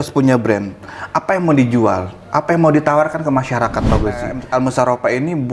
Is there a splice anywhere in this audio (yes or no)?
yes